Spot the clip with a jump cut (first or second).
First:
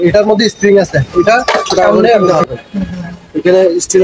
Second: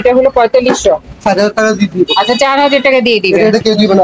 first